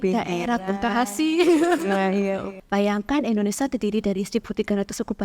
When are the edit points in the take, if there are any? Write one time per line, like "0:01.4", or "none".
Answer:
0:02.5

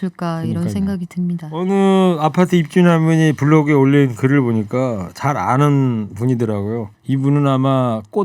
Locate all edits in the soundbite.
0:01.6
0:06.9

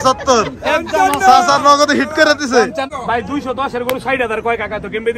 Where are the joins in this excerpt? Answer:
0:02.9

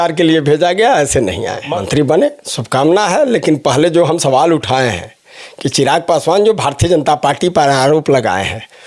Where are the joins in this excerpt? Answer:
0:01.7

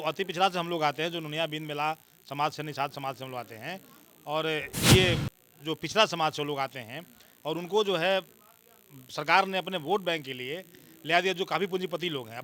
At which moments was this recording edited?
none

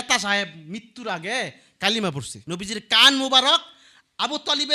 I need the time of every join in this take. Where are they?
0:02.3

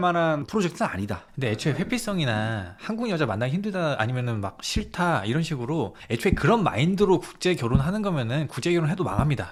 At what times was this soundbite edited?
none

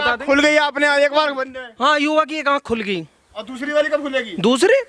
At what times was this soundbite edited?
none

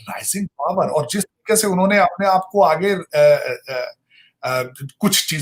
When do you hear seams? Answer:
none

